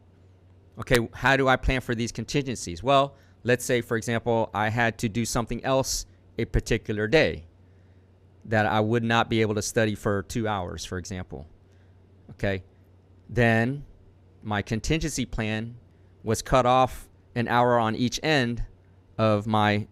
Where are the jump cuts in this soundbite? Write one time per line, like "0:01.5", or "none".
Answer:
none